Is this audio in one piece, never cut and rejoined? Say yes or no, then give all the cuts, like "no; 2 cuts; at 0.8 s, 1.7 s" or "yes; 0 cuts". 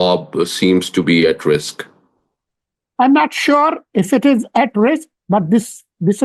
yes; 0 cuts